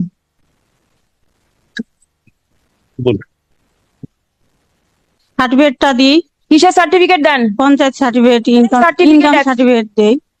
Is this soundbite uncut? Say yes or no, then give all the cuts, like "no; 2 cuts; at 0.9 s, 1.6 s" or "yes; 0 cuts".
yes; 0 cuts